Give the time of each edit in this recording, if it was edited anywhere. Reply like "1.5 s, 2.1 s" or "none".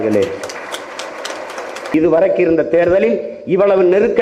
1.9 s